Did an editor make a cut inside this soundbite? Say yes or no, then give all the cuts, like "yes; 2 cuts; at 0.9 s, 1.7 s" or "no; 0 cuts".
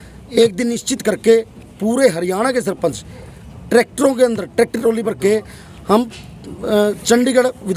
no; 0 cuts